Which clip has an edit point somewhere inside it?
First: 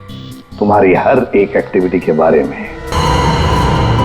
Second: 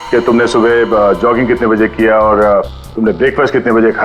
first; 1 cut; at 2.9 s

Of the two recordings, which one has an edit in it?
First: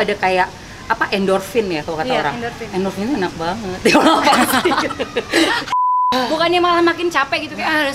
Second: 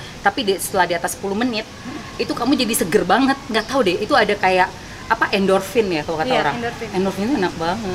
first; 1 cut; at 6.1 s

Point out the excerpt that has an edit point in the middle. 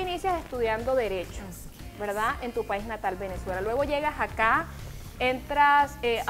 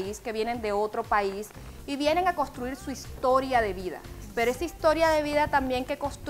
second; 1 cut; at 1.2 s

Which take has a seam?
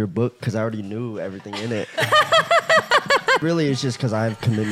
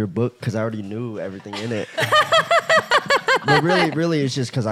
first; 1 cut; at 3.4 s

